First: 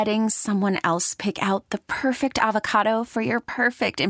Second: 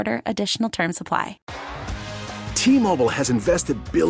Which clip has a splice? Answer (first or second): second